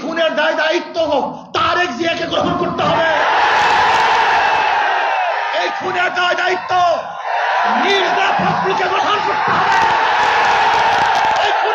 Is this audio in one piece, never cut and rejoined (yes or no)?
yes